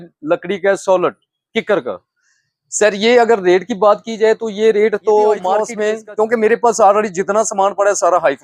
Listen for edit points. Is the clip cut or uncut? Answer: cut